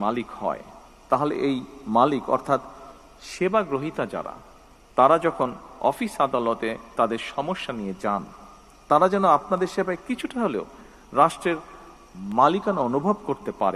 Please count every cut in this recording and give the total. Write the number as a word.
zero